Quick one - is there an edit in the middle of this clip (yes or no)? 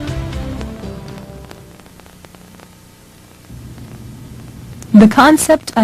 yes